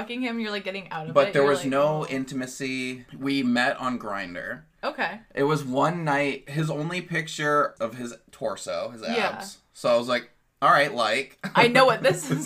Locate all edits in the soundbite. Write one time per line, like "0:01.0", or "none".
0:03.0
0:05.2
0:06.4
0:07.7